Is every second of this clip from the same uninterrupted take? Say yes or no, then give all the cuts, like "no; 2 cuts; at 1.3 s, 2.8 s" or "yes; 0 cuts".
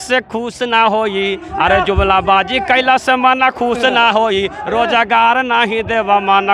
yes; 0 cuts